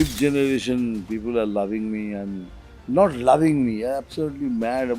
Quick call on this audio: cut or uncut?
uncut